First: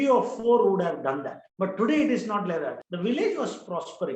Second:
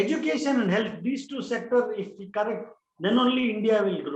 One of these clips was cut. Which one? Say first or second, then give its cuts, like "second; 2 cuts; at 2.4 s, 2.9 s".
first; 1 cut; at 2.8 s